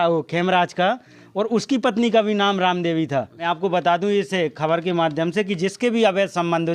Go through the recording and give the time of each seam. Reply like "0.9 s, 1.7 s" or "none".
3.4 s